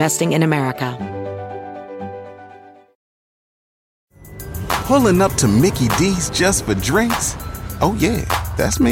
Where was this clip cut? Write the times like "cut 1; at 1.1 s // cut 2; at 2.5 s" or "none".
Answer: cut 1; at 0.9 s